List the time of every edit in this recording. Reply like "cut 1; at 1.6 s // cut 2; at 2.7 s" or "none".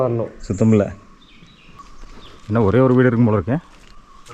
cut 1; at 2.0 s